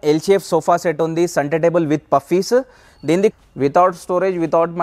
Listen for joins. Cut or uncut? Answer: cut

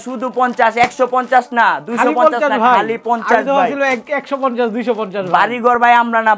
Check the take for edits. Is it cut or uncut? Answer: uncut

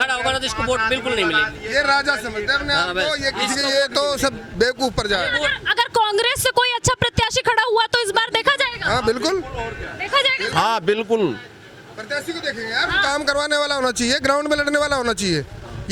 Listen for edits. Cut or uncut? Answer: uncut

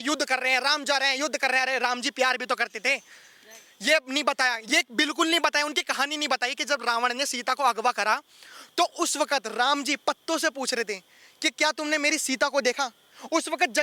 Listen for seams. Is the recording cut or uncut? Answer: uncut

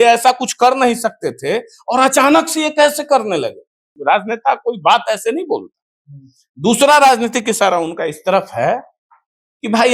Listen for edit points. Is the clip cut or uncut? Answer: cut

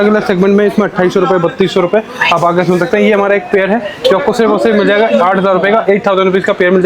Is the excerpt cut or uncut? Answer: uncut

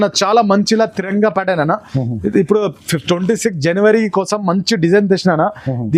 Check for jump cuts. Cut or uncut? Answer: uncut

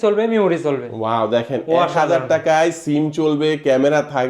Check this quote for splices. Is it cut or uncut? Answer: uncut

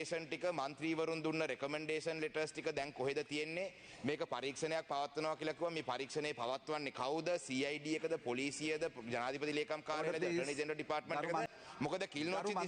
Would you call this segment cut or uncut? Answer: cut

